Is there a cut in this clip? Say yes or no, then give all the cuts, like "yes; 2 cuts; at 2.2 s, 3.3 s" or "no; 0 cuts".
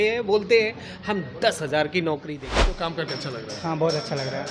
yes; 1 cut; at 2.9 s